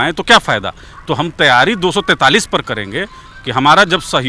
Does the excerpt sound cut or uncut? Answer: uncut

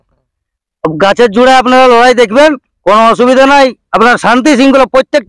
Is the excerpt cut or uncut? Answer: uncut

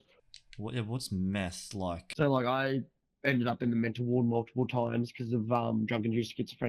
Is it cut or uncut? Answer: cut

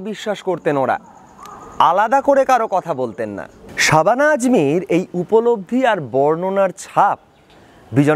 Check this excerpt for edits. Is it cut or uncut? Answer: uncut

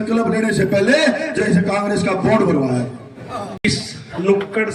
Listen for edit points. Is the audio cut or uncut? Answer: cut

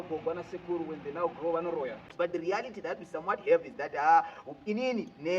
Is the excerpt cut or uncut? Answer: cut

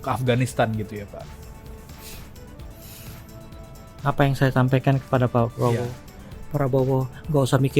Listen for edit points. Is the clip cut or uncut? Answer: uncut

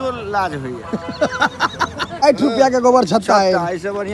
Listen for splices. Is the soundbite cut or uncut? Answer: cut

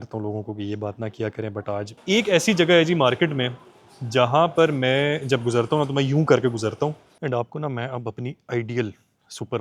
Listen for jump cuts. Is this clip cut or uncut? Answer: cut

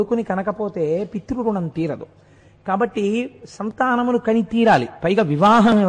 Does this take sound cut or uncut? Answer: uncut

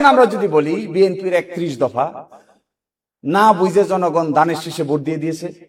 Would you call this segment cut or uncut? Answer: uncut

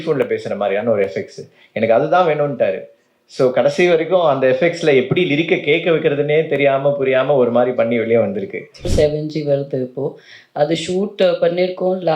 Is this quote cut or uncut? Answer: cut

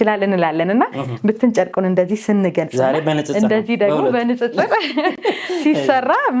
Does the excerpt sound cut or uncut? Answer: uncut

